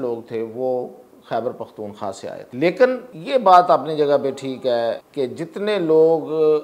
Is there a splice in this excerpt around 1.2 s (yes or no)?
no